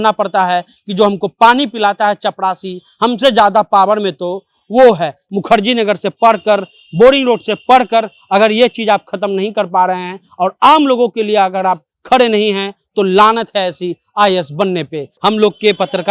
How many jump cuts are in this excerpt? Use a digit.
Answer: 2